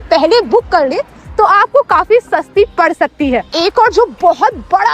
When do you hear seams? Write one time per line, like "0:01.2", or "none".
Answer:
0:03.5